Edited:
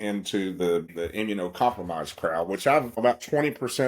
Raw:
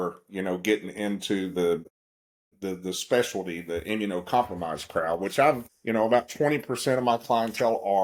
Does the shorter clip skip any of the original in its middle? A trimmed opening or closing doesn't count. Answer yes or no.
yes